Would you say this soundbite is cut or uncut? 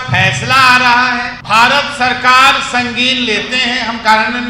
cut